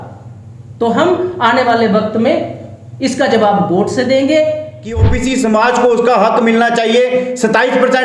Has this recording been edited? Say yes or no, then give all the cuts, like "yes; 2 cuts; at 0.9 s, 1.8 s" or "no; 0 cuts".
yes; 1 cut; at 5.1 s